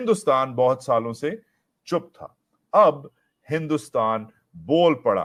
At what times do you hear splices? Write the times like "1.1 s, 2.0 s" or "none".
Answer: none